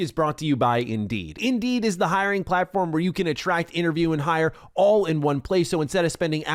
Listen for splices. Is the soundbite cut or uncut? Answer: cut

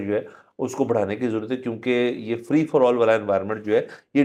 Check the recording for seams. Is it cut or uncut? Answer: uncut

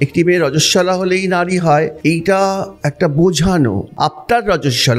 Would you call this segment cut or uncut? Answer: cut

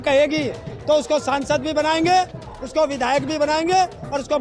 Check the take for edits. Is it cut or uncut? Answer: uncut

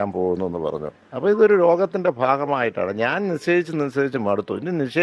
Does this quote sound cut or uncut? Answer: uncut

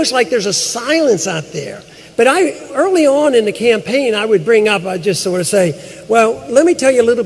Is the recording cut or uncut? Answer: cut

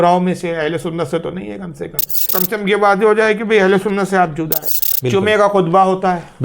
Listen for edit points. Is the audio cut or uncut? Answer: cut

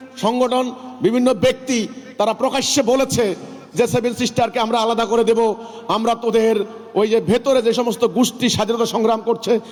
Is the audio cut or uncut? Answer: uncut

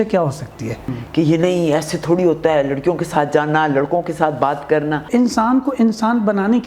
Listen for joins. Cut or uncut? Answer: cut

